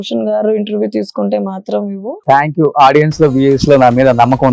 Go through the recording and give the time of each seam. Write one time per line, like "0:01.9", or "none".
0:02.2